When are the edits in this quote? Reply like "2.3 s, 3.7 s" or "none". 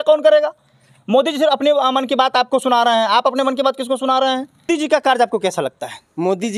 4.7 s